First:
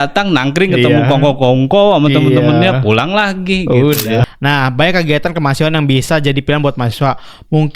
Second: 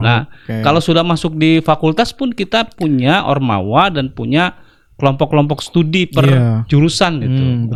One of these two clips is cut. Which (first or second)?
first